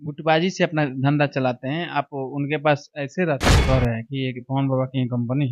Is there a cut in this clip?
yes; 1 cut; at 3.6 s

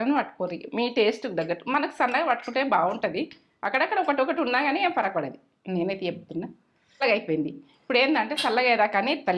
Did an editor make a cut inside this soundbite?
yes; 1 cut; at 7.0 s

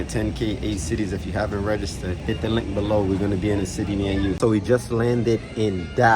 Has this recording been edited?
yes; 2 cuts; at 2.0 s, 4.4 s

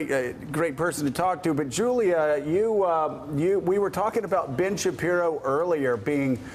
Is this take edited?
no; 0 cuts

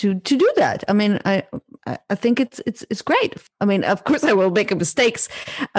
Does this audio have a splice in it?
yes; 1 cut; at 3.4 s

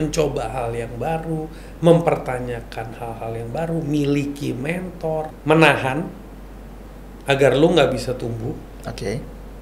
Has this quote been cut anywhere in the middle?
yes; 1 cut; at 5.3 s

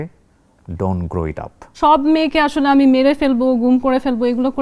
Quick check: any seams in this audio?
yes; 1 cut; at 1.6 s

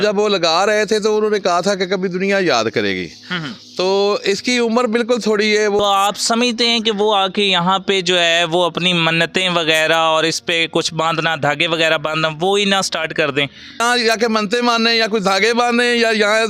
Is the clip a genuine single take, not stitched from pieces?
no; 2 cuts; at 5.8 s, 13.8 s

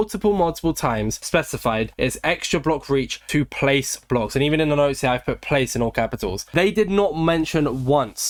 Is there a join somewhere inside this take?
no; 0 cuts

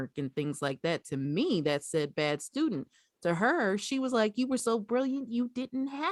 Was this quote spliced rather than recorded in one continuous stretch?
no; 0 cuts

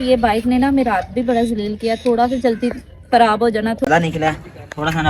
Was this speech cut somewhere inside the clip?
yes; 1 cut; at 3.9 s

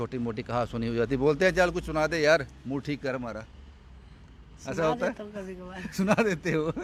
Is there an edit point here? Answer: no; 0 cuts

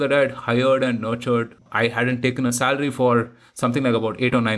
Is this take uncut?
no; 1 cut; at 1.6 s

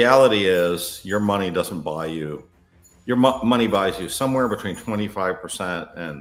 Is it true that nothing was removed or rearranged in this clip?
yes; 0 cuts

